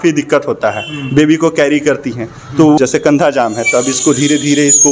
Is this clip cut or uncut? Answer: cut